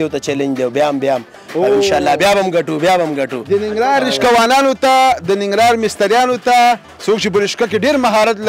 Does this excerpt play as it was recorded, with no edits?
yes; 0 cuts

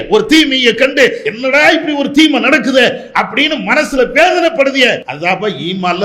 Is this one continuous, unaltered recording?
no; 2 cuts; at 1.3 s, 5.1 s

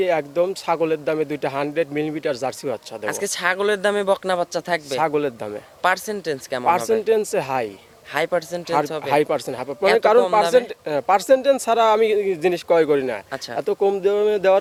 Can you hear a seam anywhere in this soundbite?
no; 0 cuts

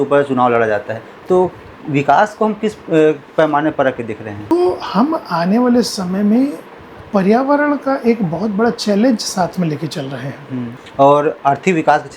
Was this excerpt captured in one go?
no; 2 cuts; at 4.5 s, 10.8 s

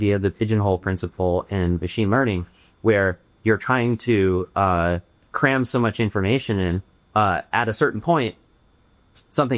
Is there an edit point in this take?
no; 0 cuts

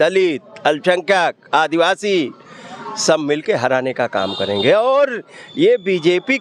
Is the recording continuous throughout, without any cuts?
yes; 0 cuts

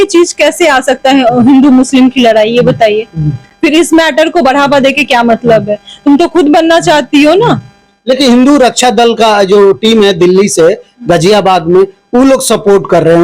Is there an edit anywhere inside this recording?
no; 0 cuts

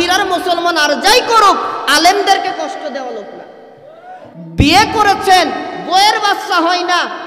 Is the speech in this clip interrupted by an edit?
yes; 1 cut; at 4.4 s

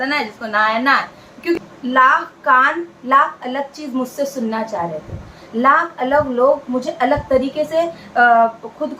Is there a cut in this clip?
yes; 1 cut; at 1.6 s

